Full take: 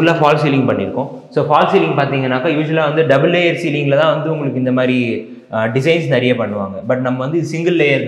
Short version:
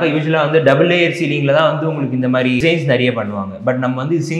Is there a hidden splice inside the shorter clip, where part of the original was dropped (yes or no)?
yes